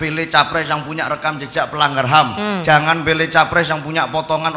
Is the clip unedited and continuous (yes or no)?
yes